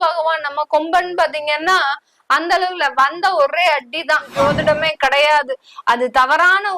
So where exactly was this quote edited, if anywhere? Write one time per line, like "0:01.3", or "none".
0:04.3

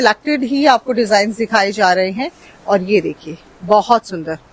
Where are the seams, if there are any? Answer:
none

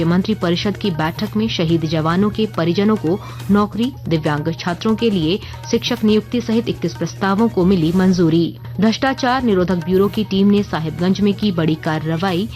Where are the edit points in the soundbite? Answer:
0:08.6

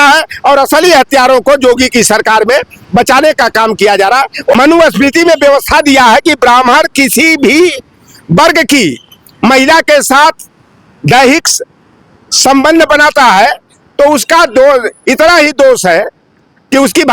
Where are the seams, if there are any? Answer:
0:04.5

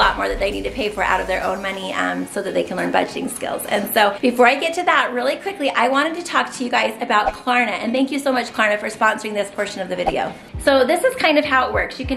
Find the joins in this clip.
none

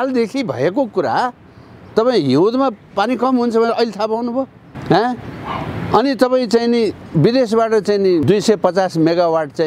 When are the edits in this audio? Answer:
0:04.7
0:08.2

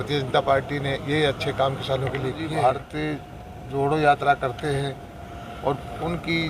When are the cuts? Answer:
0:02.4

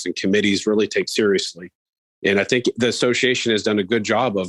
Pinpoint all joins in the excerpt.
none

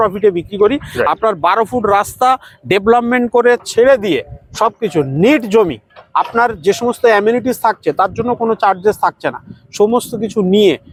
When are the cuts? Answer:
none

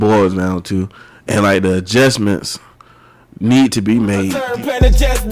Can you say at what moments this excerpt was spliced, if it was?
0:04.3

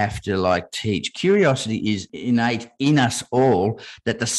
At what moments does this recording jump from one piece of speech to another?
0:02.1

